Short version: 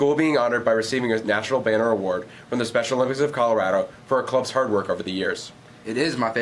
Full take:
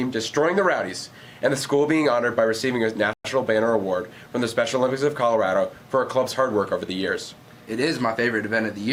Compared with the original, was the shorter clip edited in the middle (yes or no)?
yes